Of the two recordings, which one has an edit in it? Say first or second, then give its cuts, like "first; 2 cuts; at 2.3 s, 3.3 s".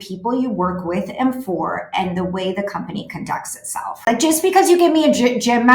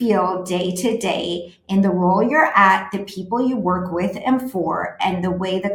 first; 1 cut; at 4.1 s